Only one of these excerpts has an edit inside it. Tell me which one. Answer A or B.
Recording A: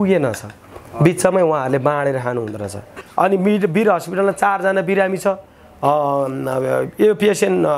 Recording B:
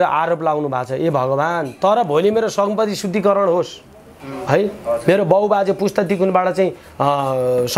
A